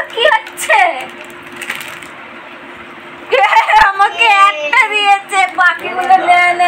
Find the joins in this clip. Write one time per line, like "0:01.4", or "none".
none